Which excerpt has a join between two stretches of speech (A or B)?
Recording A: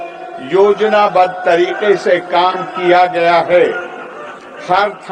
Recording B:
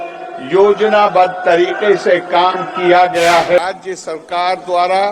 B